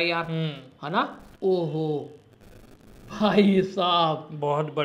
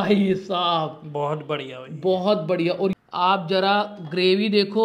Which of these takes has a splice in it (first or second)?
second